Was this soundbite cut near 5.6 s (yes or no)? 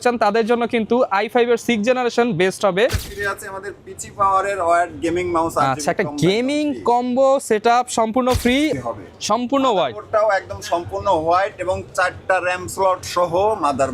no